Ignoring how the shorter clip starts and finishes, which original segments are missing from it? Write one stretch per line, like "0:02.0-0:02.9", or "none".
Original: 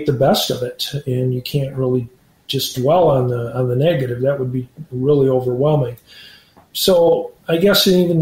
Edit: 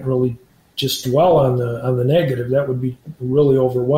none